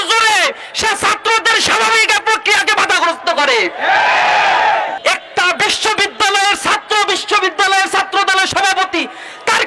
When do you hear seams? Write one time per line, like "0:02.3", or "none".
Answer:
0:05.0